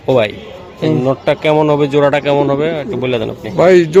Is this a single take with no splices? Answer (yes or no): yes